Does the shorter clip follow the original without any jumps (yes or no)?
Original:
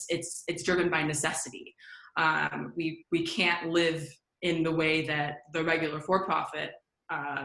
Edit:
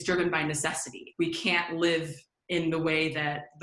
no